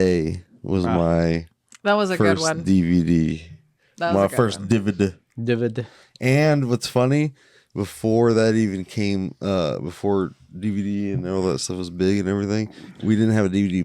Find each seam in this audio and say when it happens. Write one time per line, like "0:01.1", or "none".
none

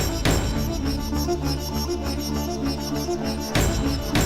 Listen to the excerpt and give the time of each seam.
none

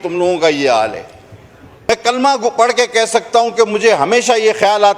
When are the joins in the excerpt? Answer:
0:01.7

